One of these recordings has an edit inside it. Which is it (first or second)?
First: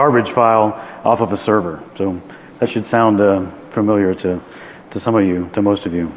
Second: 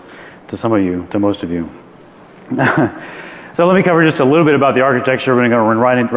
first